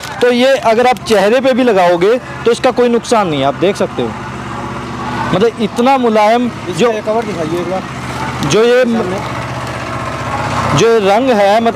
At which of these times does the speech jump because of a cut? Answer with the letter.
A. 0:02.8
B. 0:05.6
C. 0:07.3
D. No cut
D